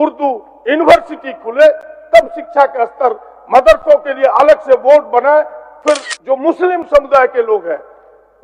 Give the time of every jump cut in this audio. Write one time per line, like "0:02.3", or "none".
0:06.1